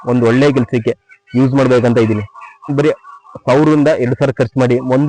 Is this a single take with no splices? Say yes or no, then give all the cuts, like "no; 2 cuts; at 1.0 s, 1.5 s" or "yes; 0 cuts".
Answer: no; 1 cut; at 2.7 s